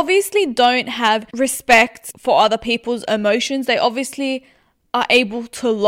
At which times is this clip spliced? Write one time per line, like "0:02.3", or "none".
0:01.3
0:02.1